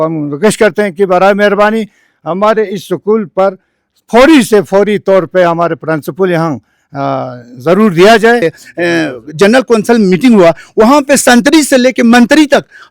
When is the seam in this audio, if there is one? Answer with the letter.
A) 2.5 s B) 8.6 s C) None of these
B